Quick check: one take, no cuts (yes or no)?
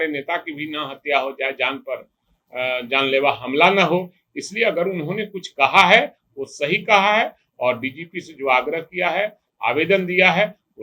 yes